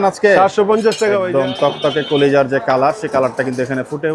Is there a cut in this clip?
yes; 1 cut; at 1.2 s

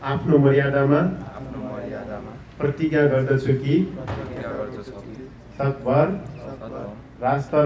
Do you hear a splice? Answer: no; 0 cuts

